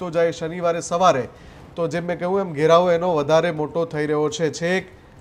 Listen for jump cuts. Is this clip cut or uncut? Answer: uncut